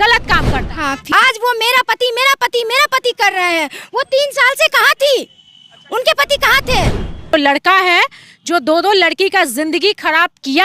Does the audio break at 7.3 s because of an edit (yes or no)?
yes